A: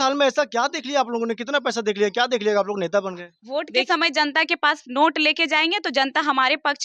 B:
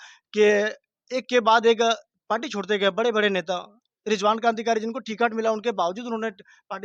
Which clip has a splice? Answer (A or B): A